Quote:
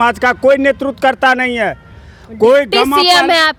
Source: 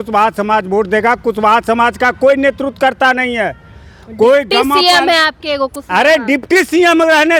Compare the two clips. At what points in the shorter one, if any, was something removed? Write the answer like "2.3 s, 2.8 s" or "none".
none